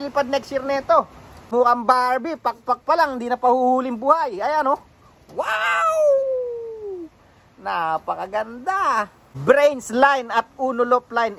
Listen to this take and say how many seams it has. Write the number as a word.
two